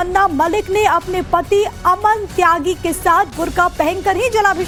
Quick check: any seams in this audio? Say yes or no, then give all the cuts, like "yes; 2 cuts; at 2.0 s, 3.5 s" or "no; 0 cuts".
no; 0 cuts